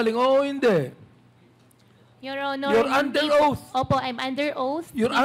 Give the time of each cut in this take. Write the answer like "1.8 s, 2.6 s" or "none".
none